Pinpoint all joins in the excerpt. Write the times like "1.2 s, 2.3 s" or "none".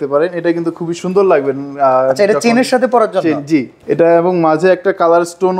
none